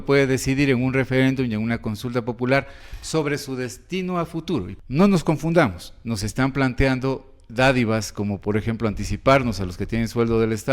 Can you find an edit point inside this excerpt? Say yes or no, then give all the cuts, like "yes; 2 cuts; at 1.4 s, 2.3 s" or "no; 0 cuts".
yes; 1 cut; at 4.7 s